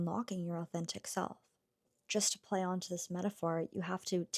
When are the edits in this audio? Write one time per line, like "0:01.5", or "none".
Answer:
0:01.9